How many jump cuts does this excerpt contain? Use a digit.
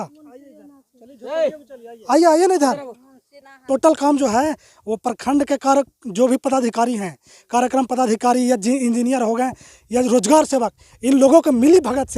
1